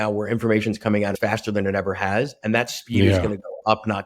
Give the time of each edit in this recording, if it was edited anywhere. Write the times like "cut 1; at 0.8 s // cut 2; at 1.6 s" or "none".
cut 1; at 1.1 s